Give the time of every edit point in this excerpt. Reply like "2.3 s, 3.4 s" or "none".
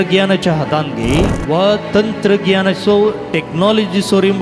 1.4 s